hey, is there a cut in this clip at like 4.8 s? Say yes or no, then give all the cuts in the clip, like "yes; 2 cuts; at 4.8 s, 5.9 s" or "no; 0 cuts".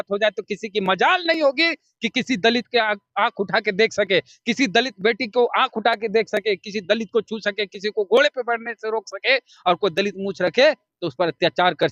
no; 0 cuts